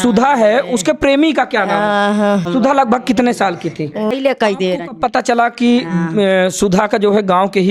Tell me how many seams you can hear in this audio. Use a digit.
2